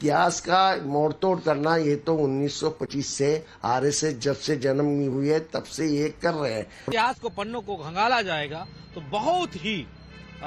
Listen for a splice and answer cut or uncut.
uncut